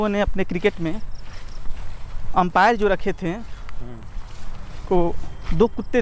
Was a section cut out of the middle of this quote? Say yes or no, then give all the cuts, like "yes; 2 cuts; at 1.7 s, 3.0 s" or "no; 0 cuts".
no; 0 cuts